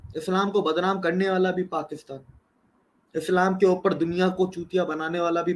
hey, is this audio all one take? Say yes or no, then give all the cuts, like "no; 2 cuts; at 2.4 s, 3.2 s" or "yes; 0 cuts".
yes; 0 cuts